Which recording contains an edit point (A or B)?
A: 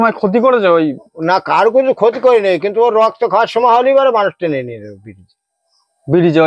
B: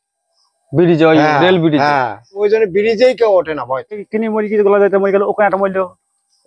B